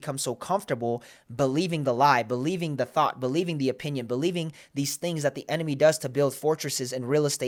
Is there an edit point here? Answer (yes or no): no